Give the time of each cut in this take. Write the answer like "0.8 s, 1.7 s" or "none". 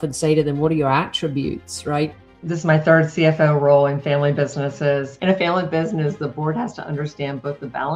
2.3 s, 5.1 s